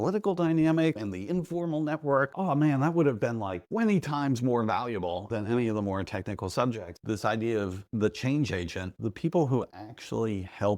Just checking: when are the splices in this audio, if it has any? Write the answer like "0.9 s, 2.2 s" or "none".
1.0 s, 2.3 s, 3.6 s, 5.3 s, 6.9 s, 8.9 s